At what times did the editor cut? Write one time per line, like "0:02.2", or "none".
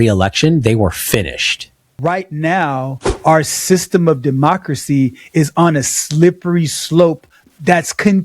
0:01.9